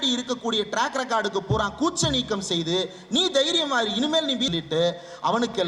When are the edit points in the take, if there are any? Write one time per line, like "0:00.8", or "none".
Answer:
0:04.5